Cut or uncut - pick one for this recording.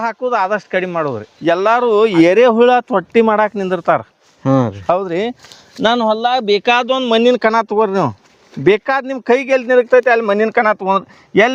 cut